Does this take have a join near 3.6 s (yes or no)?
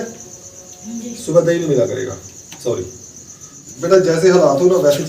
yes